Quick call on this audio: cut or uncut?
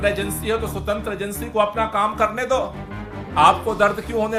uncut